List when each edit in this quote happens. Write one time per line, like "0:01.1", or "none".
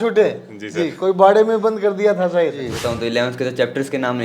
0:02.8